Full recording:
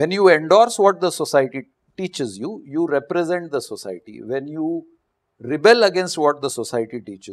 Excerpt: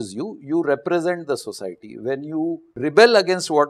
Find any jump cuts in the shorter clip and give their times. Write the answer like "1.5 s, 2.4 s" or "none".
2.7 s